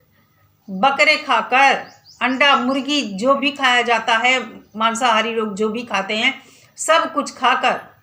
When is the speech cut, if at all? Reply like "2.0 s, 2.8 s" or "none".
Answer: none

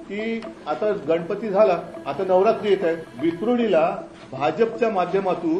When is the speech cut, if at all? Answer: 2.0 s, 3.1 s

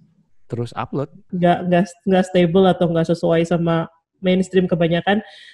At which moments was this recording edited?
1.2 s

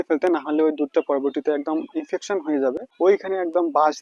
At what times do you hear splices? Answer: 2.9 s

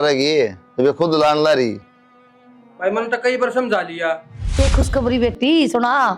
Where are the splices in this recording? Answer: 4.4 s

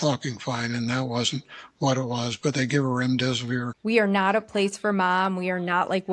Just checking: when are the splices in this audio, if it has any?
3.7 s

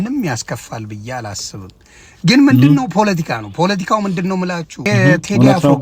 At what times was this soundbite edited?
4.9 s

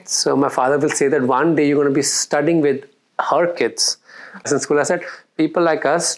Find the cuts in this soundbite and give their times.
4.5 s

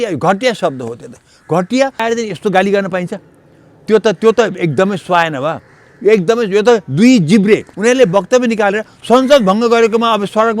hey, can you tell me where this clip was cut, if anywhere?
2.0 s, 7.7 s

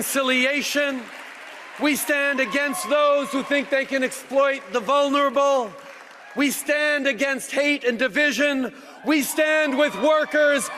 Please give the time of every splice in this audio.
none

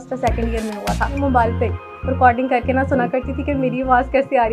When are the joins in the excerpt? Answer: 1.1 s

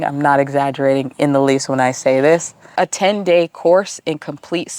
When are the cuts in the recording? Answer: 2.7 s

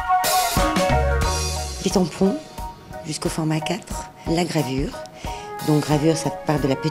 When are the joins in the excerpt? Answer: 2.5 s

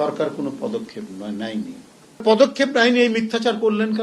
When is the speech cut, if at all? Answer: 2.2 s

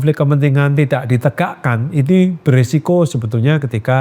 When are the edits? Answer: none

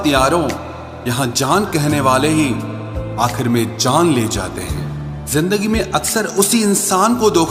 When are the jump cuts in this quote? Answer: none

